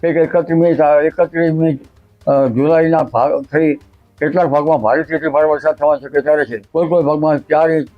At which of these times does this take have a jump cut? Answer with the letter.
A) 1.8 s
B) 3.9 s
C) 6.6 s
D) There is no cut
C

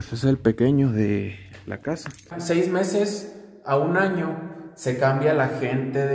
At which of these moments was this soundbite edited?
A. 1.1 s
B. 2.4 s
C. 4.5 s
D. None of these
B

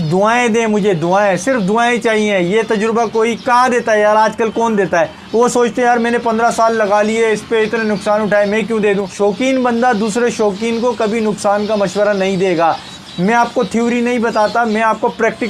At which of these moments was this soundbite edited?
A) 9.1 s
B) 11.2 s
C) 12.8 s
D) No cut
A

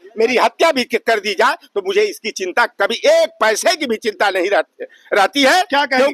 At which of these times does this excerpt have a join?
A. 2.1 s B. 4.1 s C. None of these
C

